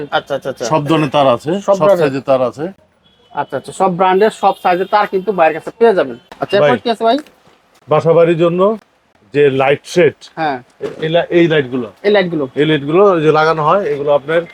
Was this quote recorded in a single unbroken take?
yes; 0 cuts

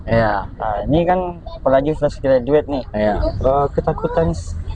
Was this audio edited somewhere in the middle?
yes; 1 cut; at 3.3 s

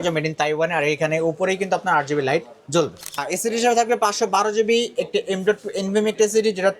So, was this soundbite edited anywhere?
yes; 1 cut; at 3.2 s

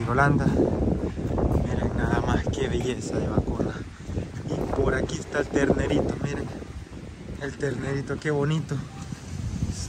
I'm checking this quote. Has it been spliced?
no; 0 cuts

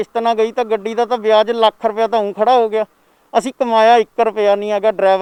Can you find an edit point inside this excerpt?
no; 0 cuts

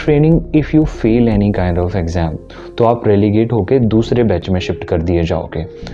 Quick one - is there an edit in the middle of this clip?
no; 0 cuts

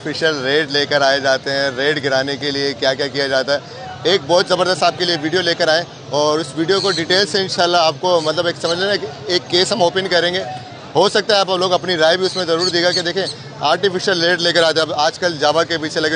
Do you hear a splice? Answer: no; 0 cuts

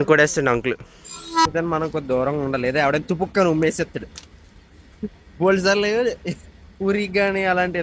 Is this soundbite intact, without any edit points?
no; 1 cut; at 1.5 s

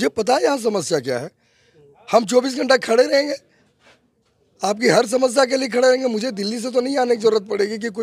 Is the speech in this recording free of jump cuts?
yes; 0 cuts

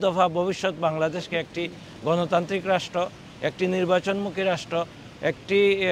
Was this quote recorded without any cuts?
yes; 0 cuts

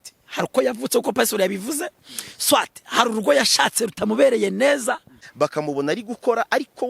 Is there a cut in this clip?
yes; 1 cut; at 5.2 s

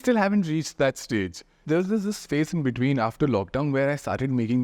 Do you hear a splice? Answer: yes; 1 cut; at 1.6 s

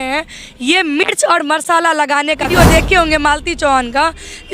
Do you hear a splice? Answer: yes; 1 cut; at 2.5 s

